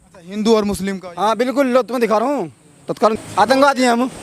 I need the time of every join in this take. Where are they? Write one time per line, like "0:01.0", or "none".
0:03.1